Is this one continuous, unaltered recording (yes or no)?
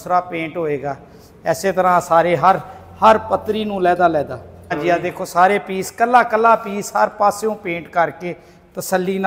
no